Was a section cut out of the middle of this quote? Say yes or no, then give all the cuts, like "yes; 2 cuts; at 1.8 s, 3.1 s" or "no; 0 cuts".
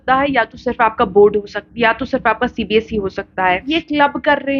yes; 1 cut; at 3.7 s